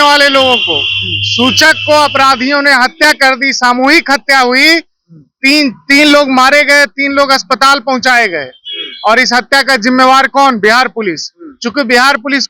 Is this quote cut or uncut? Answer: uncut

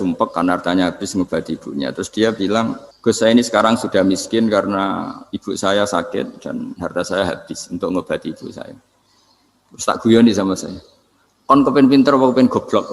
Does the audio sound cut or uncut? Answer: cut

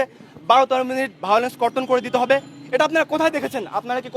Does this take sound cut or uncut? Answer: uncut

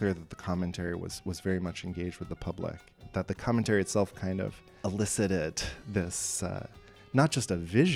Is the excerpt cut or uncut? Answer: cut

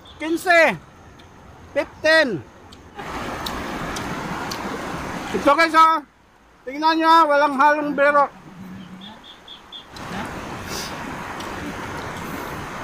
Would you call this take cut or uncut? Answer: cut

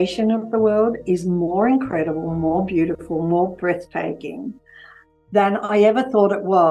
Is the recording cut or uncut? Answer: uncut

